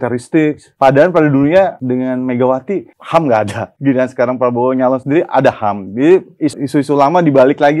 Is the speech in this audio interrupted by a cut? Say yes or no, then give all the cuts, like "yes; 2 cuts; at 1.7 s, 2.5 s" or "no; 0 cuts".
no; 0 cuts